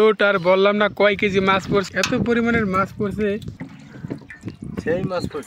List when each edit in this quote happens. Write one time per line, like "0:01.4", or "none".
none